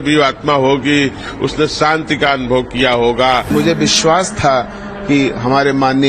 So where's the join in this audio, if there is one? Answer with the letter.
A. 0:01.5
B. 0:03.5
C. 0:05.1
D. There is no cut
B